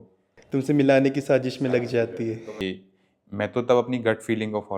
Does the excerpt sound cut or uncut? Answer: cut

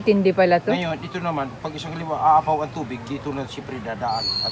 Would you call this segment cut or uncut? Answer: uncut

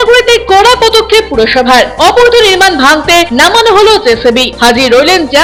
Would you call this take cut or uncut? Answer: uncut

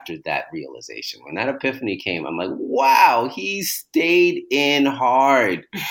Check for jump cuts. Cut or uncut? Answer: uncut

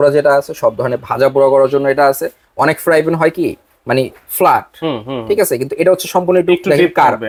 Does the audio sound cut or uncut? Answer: uncut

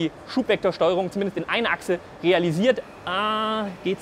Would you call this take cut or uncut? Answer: cut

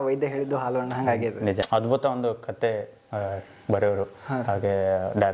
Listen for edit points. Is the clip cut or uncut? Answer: cut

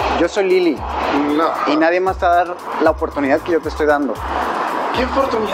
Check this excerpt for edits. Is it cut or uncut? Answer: uncut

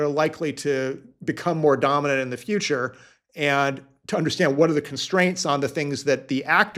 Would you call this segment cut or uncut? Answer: uncut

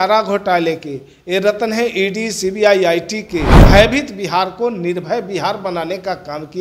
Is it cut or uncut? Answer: cut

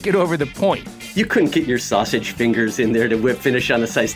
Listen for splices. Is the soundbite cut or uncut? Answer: cut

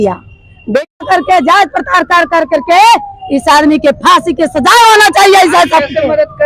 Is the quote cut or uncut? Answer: cut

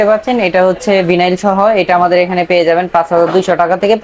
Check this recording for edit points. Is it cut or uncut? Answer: uncut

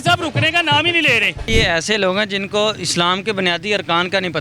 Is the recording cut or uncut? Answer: cut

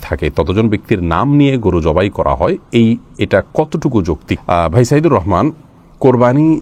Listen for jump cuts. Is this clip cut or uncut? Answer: uncut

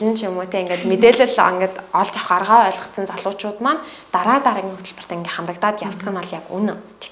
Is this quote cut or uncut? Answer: uncut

